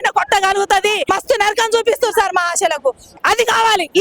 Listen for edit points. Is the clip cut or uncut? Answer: cut